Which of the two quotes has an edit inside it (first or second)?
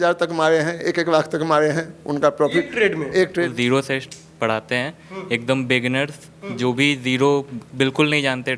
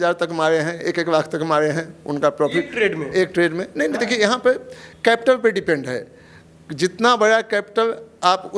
first